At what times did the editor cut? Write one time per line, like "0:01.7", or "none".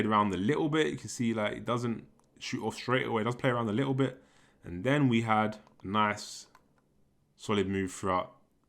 0:05.7